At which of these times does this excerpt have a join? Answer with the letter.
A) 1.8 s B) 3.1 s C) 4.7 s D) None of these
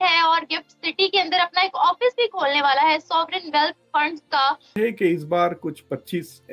C